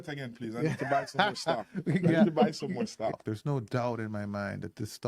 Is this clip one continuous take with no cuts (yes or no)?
no